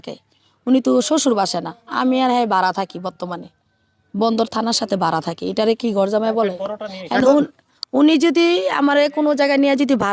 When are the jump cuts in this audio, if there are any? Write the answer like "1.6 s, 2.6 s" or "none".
none

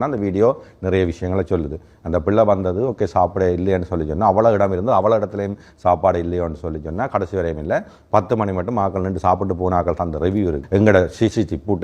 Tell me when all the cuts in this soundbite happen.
10.6 s

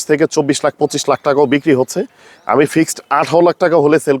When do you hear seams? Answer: none

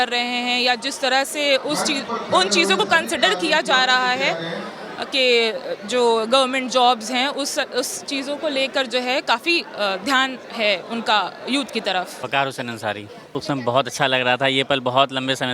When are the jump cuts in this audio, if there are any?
12.2 s, 13.4 s

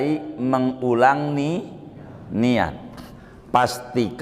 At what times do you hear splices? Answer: none

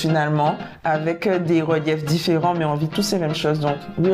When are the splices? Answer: none

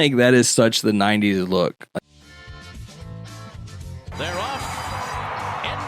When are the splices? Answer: 1.8 s

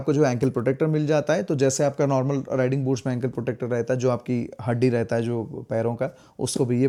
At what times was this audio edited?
none

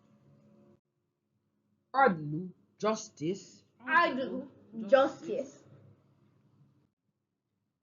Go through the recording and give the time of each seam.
2.2 s

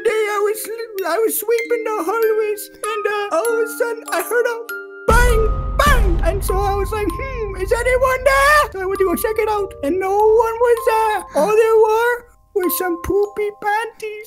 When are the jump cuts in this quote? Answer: none

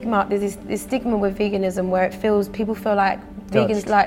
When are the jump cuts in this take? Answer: none

